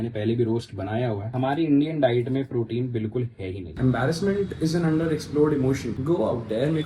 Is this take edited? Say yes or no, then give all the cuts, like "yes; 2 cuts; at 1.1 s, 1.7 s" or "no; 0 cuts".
yes; 2 cuts; at 1.3 s, 3.7 s